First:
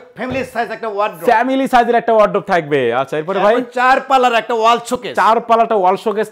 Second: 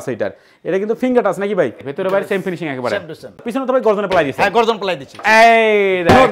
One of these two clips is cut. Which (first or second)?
second